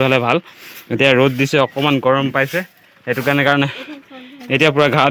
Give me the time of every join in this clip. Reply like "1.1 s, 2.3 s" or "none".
none